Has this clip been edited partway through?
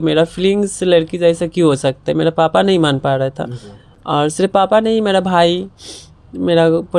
no; 0 cuts

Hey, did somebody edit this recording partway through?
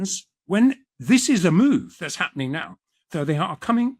yes; 1 cut; at 0.9 s

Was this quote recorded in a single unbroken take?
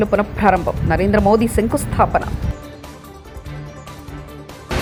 yes; 0 cuts

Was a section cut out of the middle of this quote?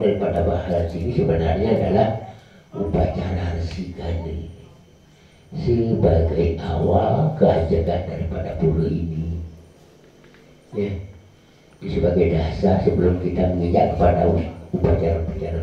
no; 0 cuts

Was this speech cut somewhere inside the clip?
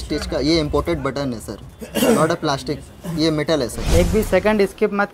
yes; 1 cut; at 3.8 s

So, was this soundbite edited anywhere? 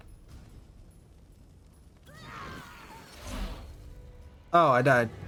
no; 0 cuts

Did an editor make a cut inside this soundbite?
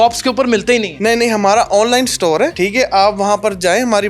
yes; 2 cuts; at 0.9 s, 2.5 s

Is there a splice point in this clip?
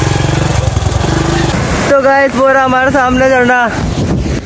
yes; 1 cut; at 1.5 s

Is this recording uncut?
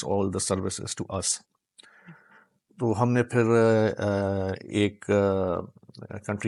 yes; 0 cuts

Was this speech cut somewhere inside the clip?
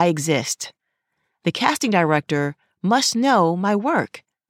no; 0 cuts

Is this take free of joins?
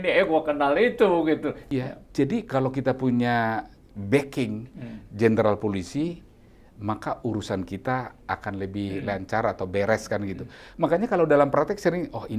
no; 1 cut; at 1.6 s

